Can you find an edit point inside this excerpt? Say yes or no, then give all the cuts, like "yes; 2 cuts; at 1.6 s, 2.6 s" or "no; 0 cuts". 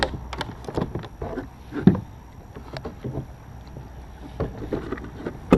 no; 0 cuts